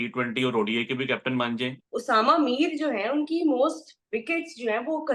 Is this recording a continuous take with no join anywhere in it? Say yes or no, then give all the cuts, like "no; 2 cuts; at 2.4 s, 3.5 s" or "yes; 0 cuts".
no; 1 cut; at 1.8 s